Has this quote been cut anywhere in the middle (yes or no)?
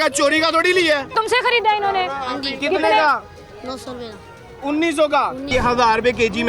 yes